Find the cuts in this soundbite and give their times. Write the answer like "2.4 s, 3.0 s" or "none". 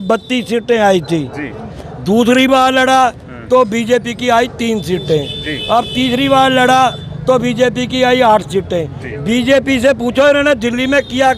none